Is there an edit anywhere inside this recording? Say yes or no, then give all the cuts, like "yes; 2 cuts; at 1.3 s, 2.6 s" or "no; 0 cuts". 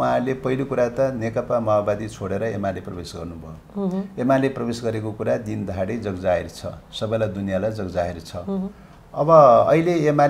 no; 0 cuts